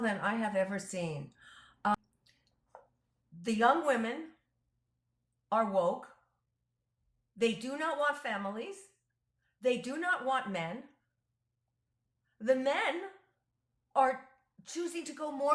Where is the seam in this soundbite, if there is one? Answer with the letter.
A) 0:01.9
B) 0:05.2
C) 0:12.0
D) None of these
A